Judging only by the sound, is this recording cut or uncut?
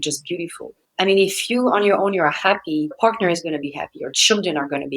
cut